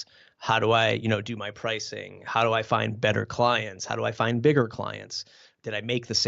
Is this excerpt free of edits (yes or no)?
yes